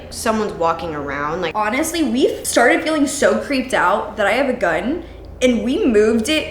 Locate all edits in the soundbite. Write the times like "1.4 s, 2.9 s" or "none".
1.5 s, 2.4 s